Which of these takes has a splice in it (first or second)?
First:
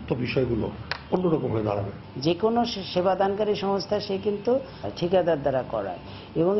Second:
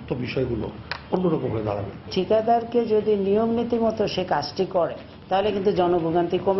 second